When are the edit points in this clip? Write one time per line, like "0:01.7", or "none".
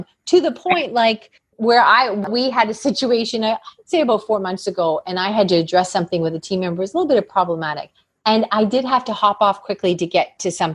0:02.3